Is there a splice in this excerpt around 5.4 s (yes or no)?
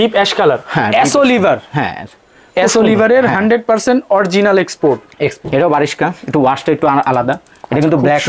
yes